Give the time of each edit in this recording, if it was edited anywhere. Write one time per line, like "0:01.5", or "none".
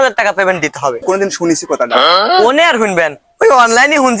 0:01.0